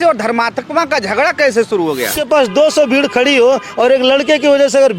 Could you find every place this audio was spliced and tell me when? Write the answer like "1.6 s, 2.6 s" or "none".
2.2 s